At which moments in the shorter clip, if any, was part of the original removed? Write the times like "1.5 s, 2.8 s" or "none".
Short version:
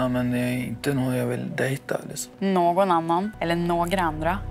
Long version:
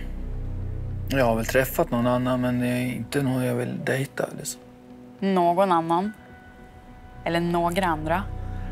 2.2 s, 3.3 s